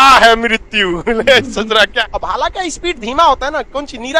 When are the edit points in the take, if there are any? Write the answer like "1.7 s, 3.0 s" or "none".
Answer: 2.0 s